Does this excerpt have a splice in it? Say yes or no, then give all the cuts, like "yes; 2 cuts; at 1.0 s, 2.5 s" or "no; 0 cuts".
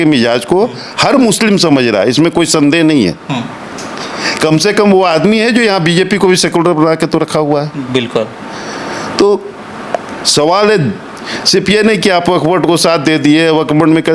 no; 0 cuts